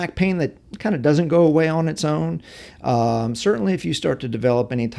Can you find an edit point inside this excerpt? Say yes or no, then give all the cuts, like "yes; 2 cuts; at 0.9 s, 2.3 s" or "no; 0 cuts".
no; 0 cuts